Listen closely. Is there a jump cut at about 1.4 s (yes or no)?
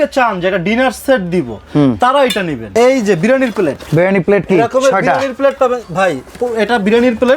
no